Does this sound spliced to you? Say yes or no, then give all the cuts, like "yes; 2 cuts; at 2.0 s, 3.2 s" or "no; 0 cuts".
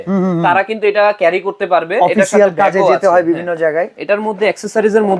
no; 0 cuts